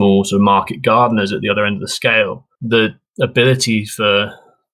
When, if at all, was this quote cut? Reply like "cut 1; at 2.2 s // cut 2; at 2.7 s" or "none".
cut 1; at 2.5 s // cut 2; at 3.0 s